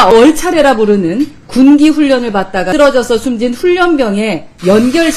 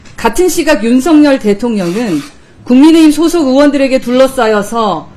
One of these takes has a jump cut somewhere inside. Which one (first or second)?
first